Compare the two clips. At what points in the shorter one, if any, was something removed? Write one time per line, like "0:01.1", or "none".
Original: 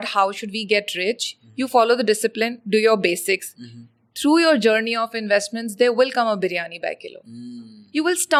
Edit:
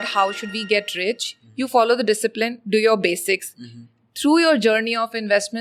none

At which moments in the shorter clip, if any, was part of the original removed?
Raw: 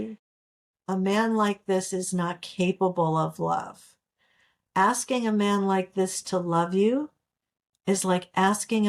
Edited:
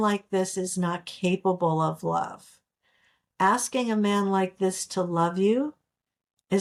none

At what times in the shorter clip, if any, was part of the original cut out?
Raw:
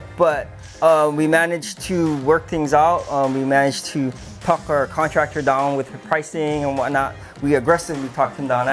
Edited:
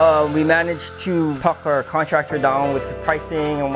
0:01.4

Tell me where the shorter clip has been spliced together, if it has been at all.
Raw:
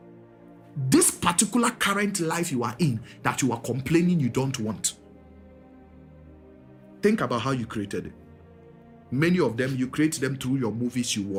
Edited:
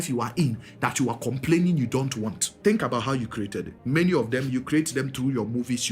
0:02.5
0:03.7

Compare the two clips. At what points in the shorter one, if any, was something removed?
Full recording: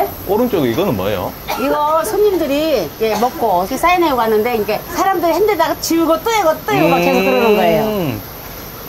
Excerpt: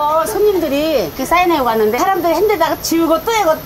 0:01.2
0:02.0

